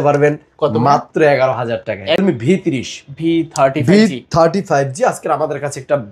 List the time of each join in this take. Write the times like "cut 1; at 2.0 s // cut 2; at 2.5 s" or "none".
cut 1; at 2.2 s